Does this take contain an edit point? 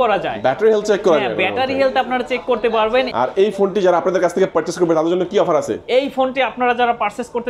yes; 1 cut; at 3.1 s

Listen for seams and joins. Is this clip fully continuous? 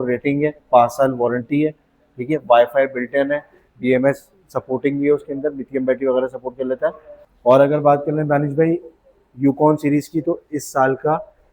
no; 1 cut; at 7.2 s

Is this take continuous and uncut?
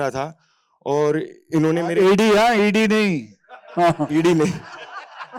yes; 0 cuts

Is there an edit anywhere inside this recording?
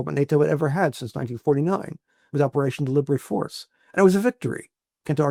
no; 0 cuts

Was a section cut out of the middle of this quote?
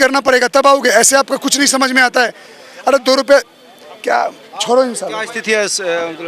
no; 0 cuts

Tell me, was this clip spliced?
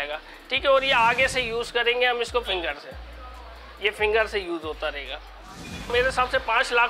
yes; 1 cut; at 5.9 s

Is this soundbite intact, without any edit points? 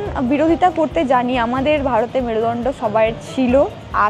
yes; 0 cuts

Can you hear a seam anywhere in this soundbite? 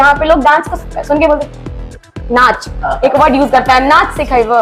no; 0 cuts

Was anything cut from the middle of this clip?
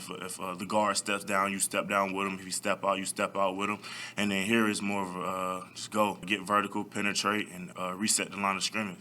yes; 2 cuts; at 6.2 s, 7.6 s

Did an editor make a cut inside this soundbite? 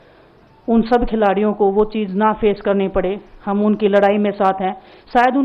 no; 0 cuts

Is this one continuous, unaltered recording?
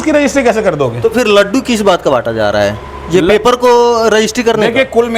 yes; 0 cuts

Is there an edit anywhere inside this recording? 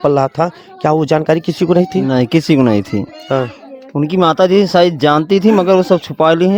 no; 0 cuts

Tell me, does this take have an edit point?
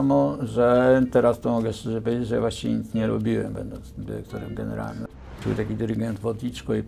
yes; 1 cut; at 5.2 s

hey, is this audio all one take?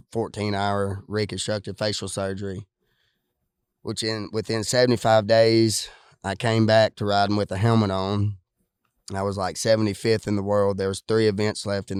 yes; 0 cuts

